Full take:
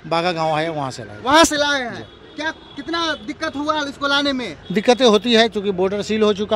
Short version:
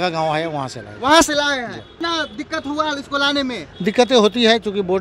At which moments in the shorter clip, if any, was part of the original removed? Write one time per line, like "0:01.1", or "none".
0:01.9